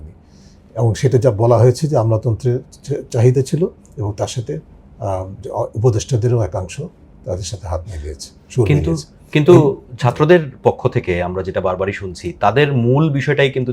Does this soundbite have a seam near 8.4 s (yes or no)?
no